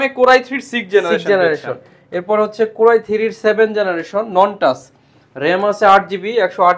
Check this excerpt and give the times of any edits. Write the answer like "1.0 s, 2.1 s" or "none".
none